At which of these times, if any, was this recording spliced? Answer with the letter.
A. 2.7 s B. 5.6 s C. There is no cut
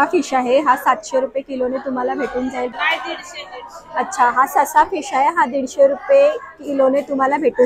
A